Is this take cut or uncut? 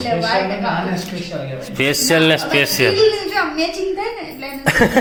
uncut